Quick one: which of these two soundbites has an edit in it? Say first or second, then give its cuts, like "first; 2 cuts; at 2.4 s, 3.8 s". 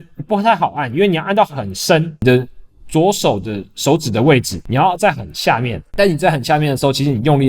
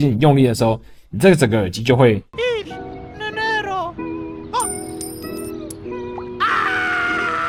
first; 3 cuts; at 2.2 s, 4.6 s, 5.8 s